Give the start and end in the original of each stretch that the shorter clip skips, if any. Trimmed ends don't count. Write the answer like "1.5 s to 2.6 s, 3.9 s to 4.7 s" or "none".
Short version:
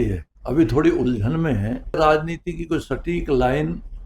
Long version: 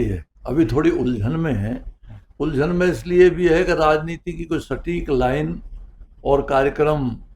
2.0 s to 3.8 s

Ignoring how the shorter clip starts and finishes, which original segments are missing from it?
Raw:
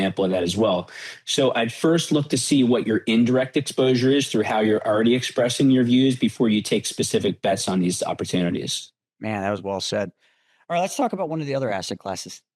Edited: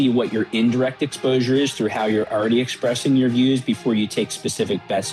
none

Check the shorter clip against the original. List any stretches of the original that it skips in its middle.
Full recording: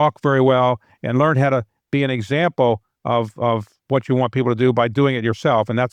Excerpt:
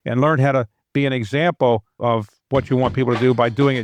2.9 s to 3.3 s

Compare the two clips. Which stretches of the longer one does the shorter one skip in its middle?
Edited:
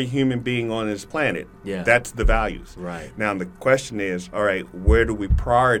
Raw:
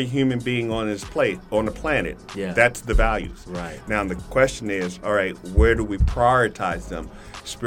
1.1 s to 1.8 s

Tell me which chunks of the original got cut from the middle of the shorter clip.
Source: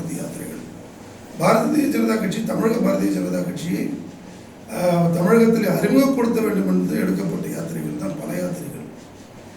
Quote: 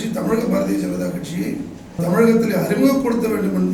4.3 s to 5.1 s

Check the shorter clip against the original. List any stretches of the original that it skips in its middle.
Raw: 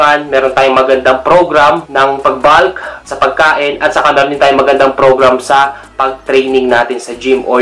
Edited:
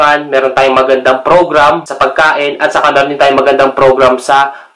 1.9 s to 3.1 s

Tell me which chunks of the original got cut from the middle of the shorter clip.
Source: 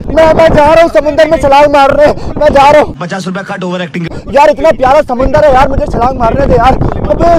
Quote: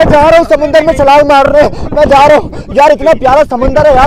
3.0 s to 4.2 s

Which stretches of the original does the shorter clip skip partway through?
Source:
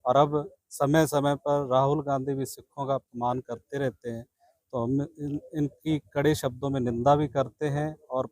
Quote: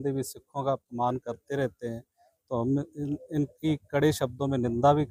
none

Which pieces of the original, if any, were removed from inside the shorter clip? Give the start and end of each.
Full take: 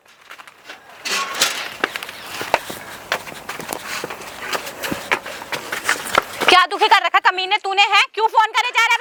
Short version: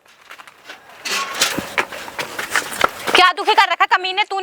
1.5 s to 4.8 s

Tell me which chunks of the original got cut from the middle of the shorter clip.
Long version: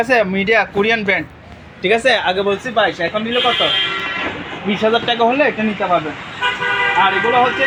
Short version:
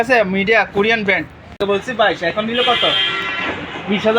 1.6 s to 2.4 s

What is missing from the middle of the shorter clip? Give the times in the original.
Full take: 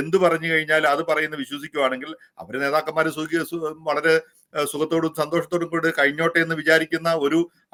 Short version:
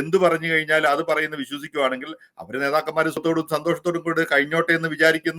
3.2 s to 4.9 s

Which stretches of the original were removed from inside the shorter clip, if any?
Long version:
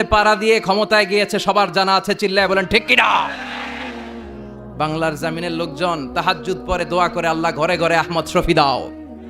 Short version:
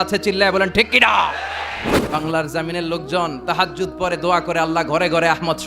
3.8 s to 4.5 s

